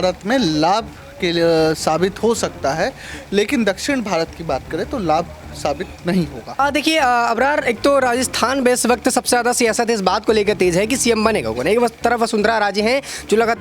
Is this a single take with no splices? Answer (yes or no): no